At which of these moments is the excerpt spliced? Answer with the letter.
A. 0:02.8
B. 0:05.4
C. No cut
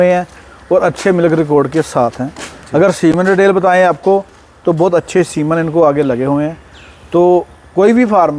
C